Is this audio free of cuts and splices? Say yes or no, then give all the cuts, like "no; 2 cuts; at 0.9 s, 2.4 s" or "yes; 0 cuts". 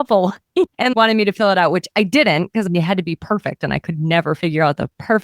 no; 2 cuts; at 0.7 s, 2.6 s